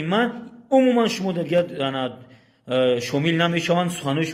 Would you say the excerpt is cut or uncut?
uncut